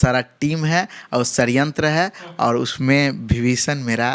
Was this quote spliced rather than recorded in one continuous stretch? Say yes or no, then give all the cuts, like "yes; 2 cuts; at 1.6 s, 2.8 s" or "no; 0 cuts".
no; 0 cuts